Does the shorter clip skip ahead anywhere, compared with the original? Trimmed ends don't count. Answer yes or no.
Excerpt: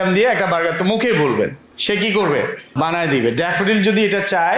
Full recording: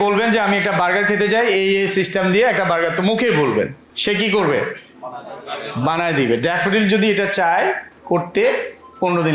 yes